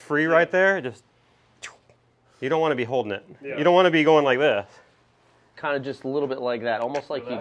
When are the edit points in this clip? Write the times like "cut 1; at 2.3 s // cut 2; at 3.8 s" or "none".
cut 1; at 2.2 s // cut 2; at 5.5 s